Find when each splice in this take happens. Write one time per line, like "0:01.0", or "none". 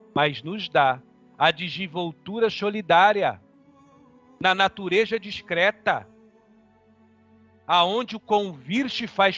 0:06.1
0:07.6